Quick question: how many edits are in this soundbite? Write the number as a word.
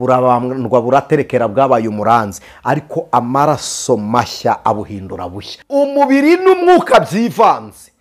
one